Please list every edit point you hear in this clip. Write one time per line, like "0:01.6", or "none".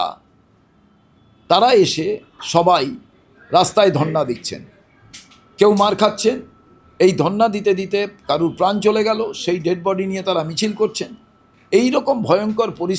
none